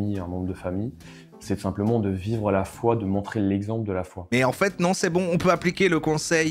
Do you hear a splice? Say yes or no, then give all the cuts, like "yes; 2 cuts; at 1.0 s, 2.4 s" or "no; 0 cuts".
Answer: yes; 1 cut; at 4.3 s